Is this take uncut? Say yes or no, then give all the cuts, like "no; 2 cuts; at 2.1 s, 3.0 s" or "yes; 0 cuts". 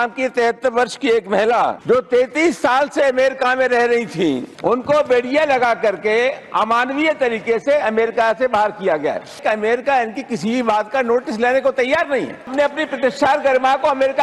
no; 4 cuts; at 1.8 s, 4.5 s, 9.4 s, 12.5 s